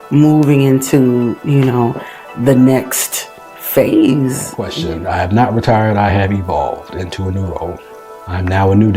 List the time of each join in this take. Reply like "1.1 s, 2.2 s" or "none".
4.7 s